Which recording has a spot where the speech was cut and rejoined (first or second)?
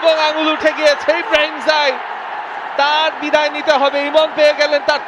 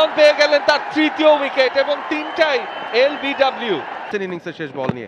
second